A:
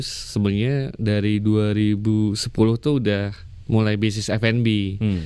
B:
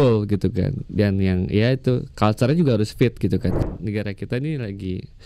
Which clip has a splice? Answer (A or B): B